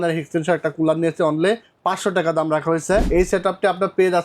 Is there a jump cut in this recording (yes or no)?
yes